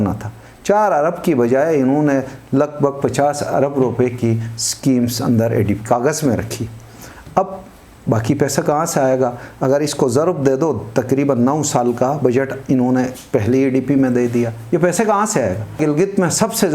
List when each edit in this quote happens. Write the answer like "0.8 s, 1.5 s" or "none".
15.8 s